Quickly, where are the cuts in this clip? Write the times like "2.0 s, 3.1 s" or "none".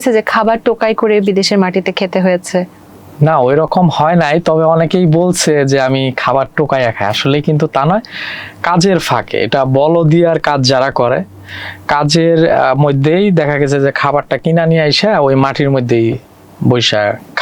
none